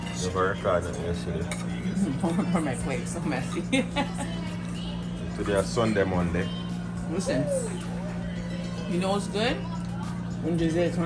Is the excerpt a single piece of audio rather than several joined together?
yes; 0 cuts

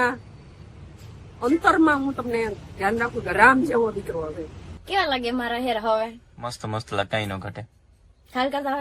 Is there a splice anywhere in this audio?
yes; 1 cut; at 4.8 s

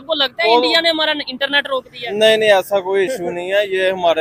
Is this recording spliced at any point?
no; 0 cuts

